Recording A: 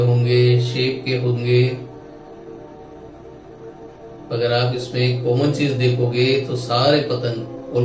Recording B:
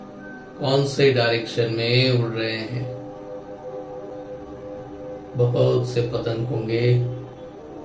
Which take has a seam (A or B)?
B